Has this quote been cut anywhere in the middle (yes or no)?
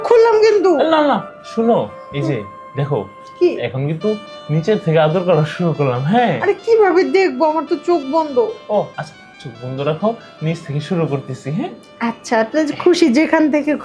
no